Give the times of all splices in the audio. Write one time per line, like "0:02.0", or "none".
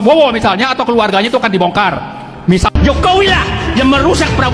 0:02.7

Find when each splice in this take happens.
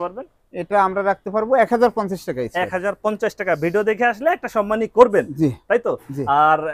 none

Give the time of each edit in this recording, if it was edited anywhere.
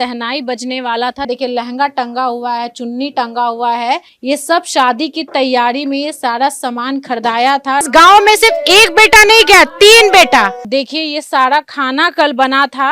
0:01.3
0:04.1
0:07.9
0:10.6

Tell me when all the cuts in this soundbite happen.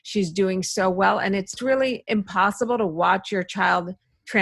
0:01.6

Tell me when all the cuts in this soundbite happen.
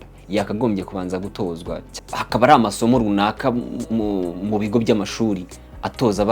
0:01.9

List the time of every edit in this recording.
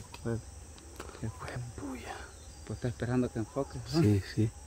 none

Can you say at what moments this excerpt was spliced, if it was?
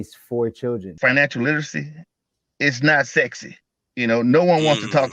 0:00.9

